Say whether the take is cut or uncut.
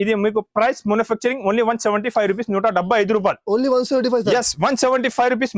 uncut